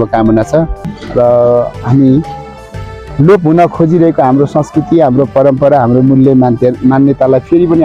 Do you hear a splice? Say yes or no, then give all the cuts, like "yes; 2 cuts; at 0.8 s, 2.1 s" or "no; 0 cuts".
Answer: yes; 1 cut; at 1.0 s